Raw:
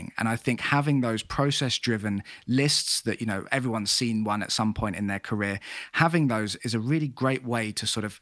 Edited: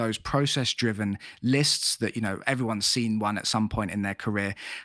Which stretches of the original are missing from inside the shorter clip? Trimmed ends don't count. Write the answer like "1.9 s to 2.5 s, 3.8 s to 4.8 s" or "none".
none